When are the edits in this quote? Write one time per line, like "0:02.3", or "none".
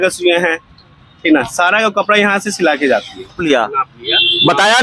0:03.4